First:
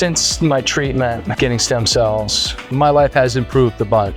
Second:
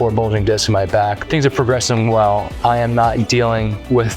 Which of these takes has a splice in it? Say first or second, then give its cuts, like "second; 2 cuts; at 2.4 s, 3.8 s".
second; 2 cuts; at 1.2 s, 2.5 s